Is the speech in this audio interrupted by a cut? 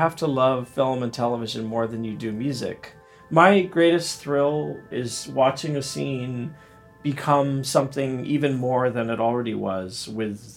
yes; 2 cuts; at 2.8 s, 4.9 s

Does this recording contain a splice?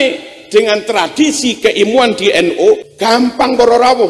yes; 1 cut; at 2.9 s

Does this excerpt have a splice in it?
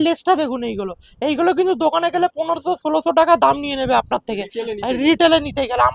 no; 0 cuts

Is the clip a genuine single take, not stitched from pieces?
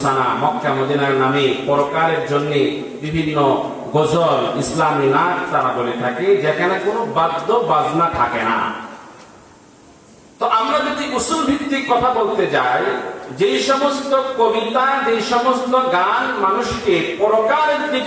yes; 0 cuts

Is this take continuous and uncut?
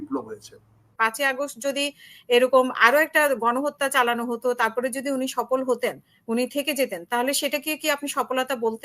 no; 1 cut; at 0.9 s

